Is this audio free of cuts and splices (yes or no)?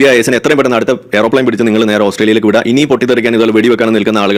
yes